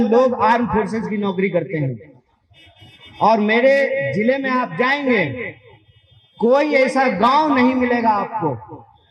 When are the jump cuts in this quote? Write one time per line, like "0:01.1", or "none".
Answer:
none